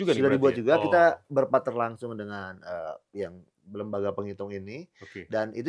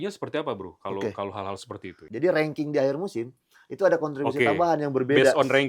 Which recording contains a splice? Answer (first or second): second